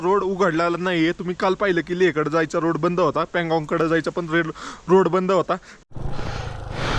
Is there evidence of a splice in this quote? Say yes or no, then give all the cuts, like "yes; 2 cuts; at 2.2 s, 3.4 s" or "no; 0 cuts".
yes; 1 cut; at 5.9 s